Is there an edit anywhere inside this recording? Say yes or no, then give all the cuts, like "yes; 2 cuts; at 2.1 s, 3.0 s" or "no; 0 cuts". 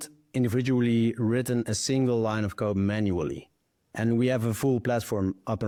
no; 0 cuts